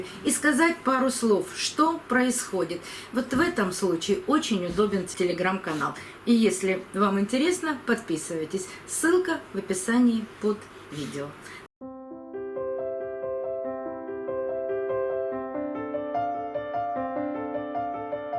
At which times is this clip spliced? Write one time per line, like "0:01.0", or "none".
0:11.5